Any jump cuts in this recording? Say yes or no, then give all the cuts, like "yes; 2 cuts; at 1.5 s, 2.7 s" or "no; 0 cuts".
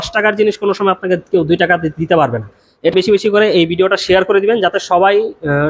yes; 1 cut; at 2.9 s